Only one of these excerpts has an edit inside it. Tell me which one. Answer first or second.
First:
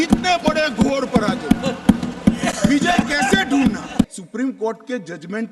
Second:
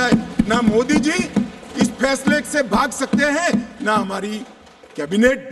first